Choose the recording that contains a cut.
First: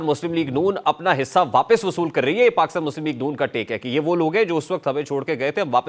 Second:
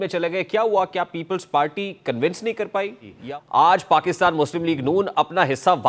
second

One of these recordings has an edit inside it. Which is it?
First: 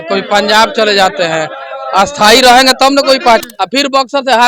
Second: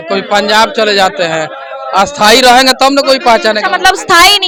first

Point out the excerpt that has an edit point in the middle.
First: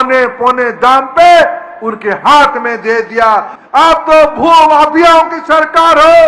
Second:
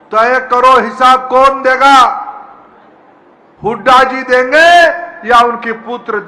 first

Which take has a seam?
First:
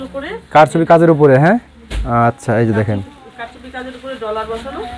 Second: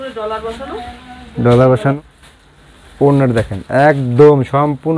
second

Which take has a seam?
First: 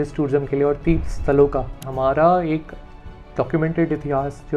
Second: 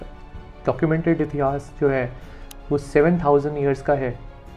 first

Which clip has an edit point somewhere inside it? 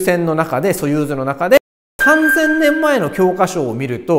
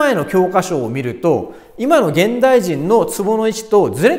first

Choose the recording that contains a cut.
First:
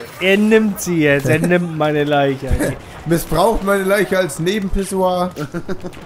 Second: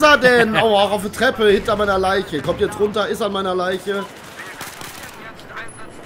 first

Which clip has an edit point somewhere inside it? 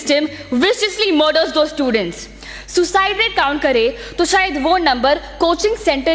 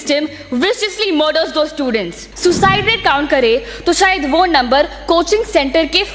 second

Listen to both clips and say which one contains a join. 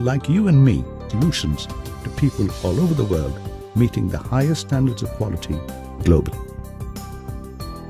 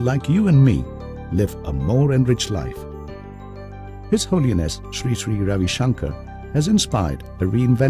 second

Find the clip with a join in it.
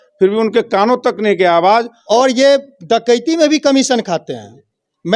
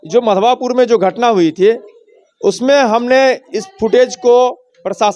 first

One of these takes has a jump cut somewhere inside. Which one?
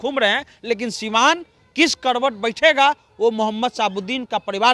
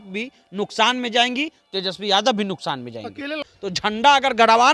second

